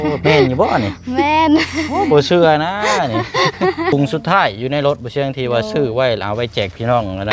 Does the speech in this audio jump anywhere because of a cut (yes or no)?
yes